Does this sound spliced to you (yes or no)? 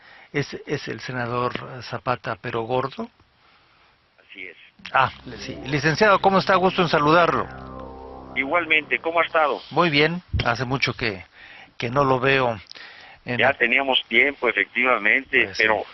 yes